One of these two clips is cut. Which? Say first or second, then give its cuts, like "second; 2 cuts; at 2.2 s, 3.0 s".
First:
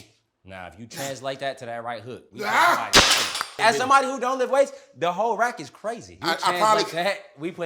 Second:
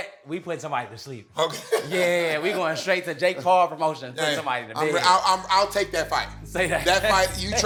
first; 2 cuts; at 3.6 s, 6.2 s